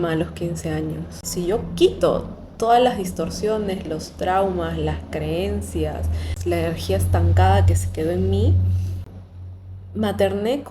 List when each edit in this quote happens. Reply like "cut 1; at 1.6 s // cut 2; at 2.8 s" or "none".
cut 1; at 1.2 s // cut 2; at 6.3 s